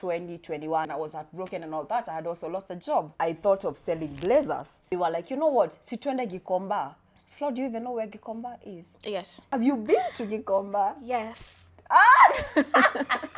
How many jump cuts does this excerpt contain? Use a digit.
3